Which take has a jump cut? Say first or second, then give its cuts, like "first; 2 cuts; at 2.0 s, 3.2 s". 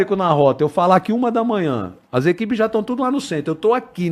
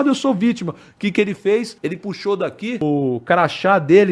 second; 2 cuts; at 1.7 s, 2.8 s